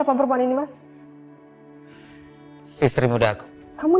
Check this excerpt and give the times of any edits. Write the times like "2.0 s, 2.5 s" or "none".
none